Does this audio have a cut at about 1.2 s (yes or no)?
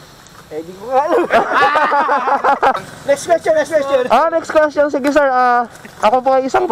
no